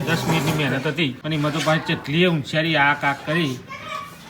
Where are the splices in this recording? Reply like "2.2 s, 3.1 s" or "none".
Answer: 1.2 s